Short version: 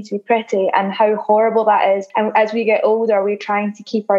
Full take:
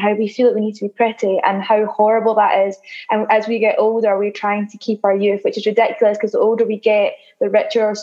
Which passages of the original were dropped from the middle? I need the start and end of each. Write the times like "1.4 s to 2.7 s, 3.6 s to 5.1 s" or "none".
2.8 s to 3.0 s